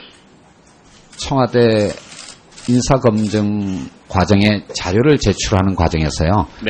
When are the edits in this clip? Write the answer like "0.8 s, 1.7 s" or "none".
none